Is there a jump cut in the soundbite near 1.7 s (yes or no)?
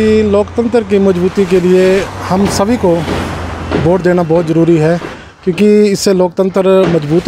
no